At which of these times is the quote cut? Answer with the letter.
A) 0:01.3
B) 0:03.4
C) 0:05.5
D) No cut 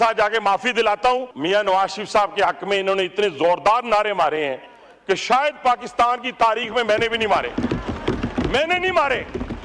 A